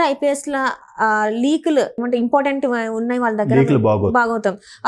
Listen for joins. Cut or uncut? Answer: cut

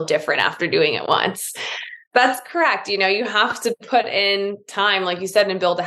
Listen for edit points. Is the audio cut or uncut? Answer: cut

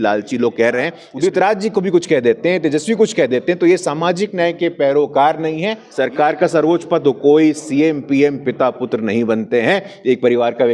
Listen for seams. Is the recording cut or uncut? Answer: cut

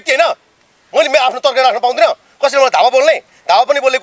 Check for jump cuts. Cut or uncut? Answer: uncut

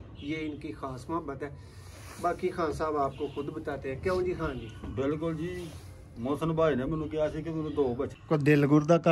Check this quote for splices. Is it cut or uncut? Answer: cut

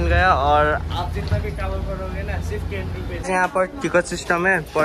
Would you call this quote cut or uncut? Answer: cut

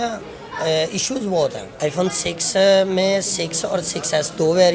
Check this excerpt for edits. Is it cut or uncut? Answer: cut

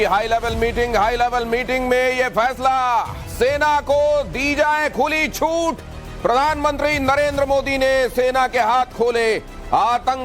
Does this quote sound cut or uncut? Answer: cut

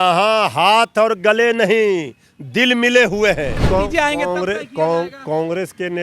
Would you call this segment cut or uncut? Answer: cut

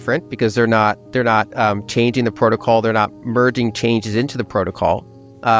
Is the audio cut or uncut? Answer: uncut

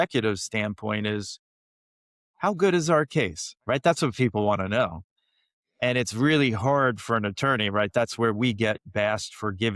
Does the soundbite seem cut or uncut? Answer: uncut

